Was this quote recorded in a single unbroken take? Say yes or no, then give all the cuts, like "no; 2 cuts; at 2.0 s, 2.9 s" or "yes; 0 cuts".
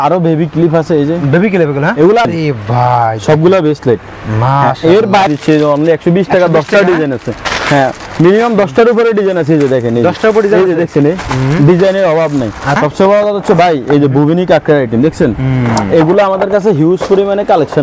no; 3 cuts; at 2.3 s, 5.3 s, 12.8 s